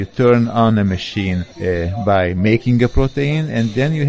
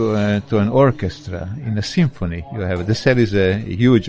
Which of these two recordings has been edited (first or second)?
first